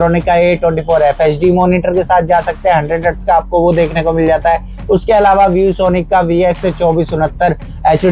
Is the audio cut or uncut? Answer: uncut